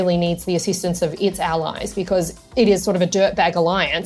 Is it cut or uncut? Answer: uncut